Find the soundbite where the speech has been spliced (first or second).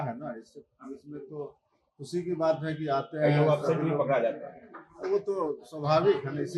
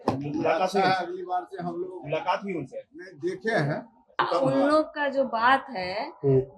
second